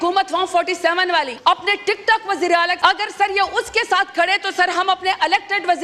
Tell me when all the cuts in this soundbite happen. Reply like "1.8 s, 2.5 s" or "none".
1.3 s, 2.7 s